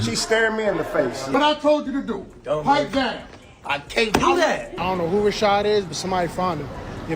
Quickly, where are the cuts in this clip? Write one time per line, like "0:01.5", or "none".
0:01.3
0:04.8